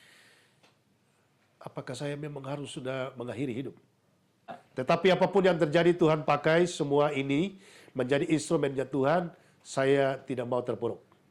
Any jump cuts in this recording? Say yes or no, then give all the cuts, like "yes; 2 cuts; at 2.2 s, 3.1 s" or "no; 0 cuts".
yes; 1 cut; at 4.5 s